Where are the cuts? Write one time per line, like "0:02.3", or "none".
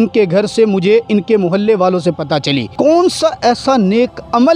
0:02.7